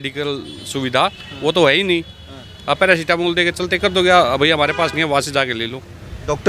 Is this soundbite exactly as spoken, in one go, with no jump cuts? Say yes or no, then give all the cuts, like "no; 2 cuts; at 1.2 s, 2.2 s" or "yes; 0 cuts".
yes; 0 cuts